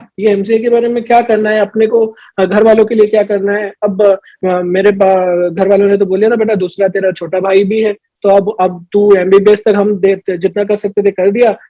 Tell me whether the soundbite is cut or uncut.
uncut